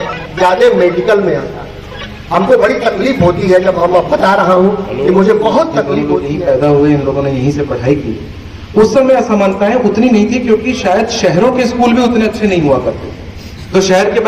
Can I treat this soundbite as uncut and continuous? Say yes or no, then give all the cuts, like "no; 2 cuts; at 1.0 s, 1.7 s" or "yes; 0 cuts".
no; 1 cut; at 6.0 s